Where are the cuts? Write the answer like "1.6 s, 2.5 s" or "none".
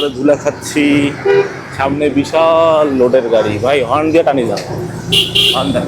none